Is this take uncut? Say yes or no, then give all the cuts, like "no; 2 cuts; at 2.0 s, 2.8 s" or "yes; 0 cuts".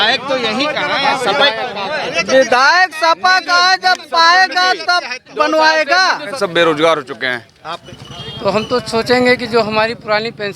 no; 2 cuts; at 6.3 s, 7.7 s